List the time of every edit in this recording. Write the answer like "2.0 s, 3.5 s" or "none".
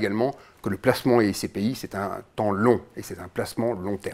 none